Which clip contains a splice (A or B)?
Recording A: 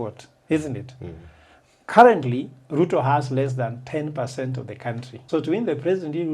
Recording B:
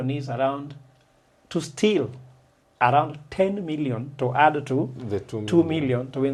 A